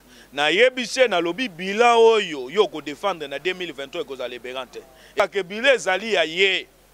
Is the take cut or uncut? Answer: cut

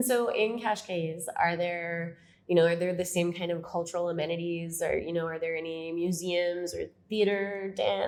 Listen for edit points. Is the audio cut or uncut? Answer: uncut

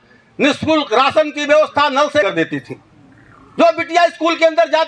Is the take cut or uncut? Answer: cut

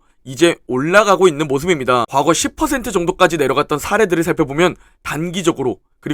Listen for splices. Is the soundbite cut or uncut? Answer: cut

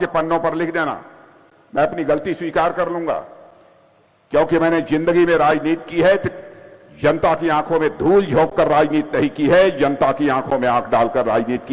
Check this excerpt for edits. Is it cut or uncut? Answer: uncut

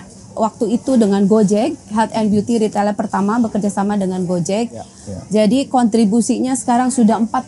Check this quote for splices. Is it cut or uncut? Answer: cut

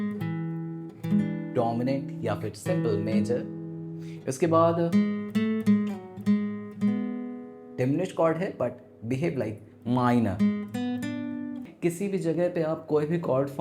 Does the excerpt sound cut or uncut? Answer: cut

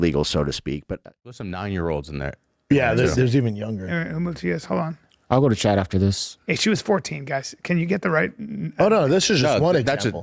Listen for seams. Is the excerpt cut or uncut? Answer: cut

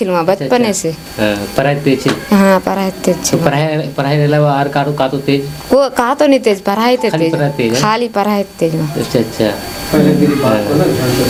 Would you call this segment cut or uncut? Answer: uncut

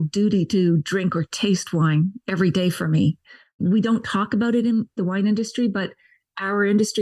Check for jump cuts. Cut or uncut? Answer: cut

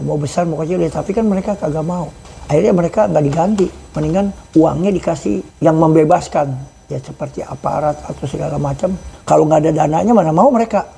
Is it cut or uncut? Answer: cut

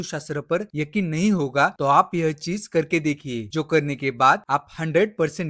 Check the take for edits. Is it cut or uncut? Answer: uncut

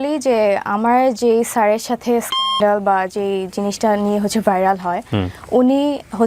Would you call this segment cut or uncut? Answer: uncut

